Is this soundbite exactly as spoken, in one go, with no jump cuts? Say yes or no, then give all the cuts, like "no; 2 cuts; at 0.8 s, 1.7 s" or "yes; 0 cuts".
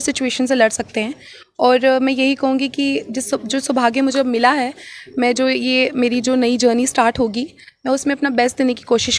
yes; 0 cuts